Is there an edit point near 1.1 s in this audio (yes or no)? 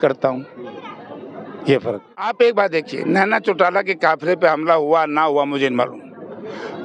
no